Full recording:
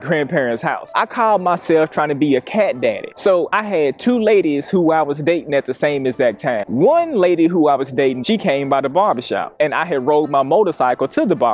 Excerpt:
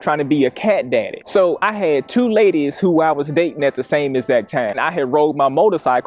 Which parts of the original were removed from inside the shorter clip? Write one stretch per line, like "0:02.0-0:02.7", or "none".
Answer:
0:06.7-0:09.7